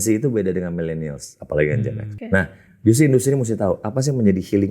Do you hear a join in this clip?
yes; 1 cut; at 2.2 s

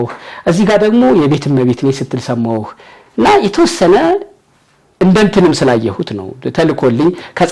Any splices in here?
no; 0 cuts

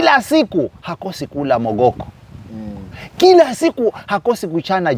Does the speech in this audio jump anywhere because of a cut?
no; 0 cuts

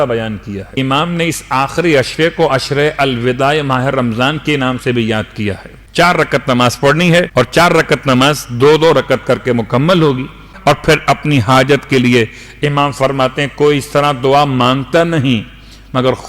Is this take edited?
yes; 4 cuts; at 0.8 s, 5.7 s, 7.3 s, 10.5 s

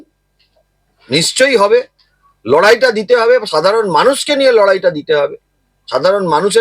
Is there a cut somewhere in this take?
no; 0 cuts

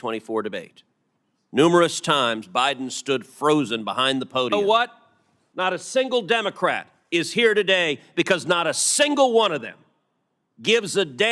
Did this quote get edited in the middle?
yes; 1 cut; at 4.5 s

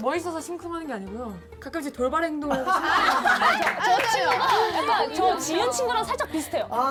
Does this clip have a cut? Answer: no; 0 cuts

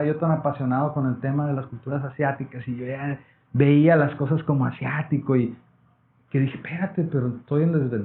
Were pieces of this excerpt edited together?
no; 0 cuts

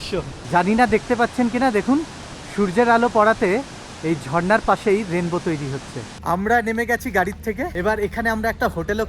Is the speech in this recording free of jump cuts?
no; 2 cuts; at 6.1 s, 7.7 s

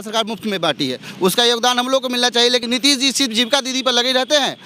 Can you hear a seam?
yes; 1 cut; at 2.6 s

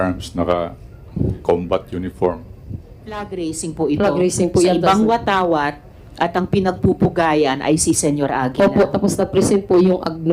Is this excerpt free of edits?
no; 1 cut; at 3.3 s

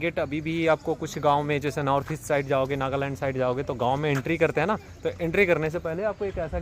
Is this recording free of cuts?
yes; 0 cuts

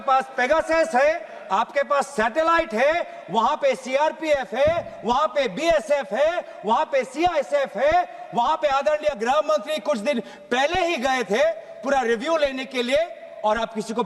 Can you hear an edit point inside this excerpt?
no; 0 cuts

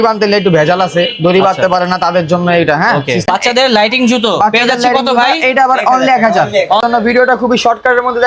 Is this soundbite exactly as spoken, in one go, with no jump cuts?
no; 2 cuts; at 3.3 s, 6.8 s

